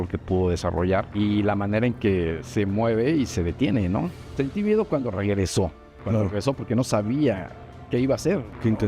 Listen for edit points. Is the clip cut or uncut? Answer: cut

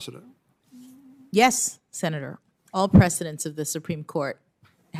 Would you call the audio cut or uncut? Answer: uncut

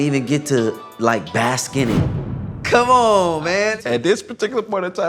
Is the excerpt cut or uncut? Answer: cut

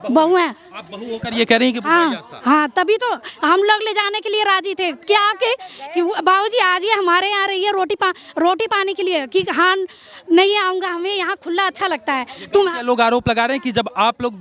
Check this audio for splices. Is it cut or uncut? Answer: uncut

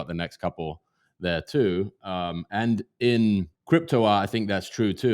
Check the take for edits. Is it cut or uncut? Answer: cut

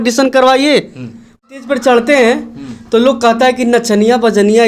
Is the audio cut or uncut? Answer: cut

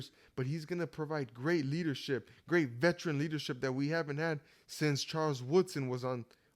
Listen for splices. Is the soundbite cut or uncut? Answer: uncut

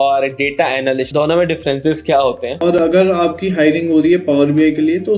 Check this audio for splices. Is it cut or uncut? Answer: cut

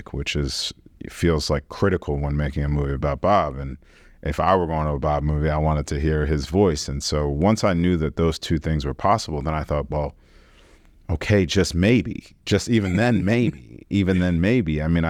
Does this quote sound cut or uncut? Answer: uncut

